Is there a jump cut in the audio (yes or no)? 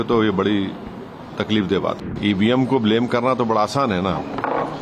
yes